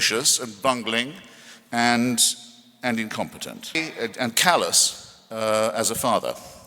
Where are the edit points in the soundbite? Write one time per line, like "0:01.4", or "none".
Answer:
0:03.8

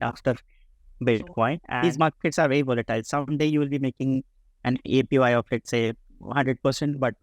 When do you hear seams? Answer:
0:01.7

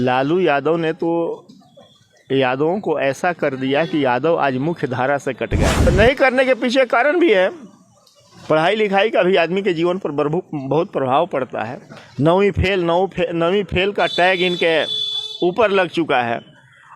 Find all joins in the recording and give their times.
0:05.9

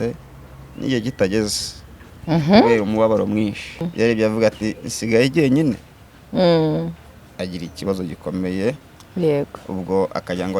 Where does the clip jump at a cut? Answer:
0:03.9

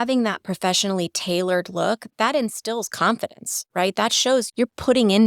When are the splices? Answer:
0:02.0
0:04.5

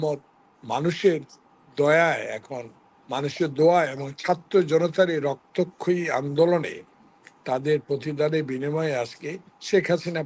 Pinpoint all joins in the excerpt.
none

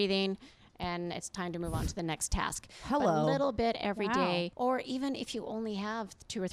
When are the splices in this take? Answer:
0:04.5

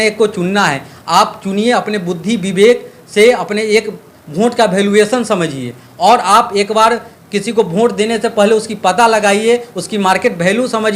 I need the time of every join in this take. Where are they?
none

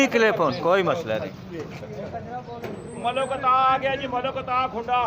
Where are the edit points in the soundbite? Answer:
0:01.8

